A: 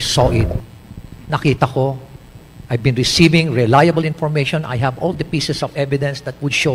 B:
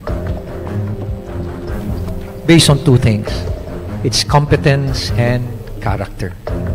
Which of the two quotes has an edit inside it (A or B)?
B